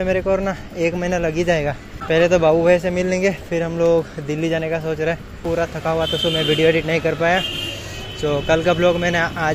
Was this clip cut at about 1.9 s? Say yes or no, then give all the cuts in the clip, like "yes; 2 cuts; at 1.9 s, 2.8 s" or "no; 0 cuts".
yes; 2 cuts; at 1.9 s, 5.4 s